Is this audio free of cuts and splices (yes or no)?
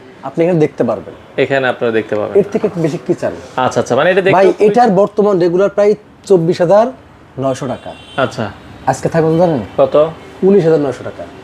yes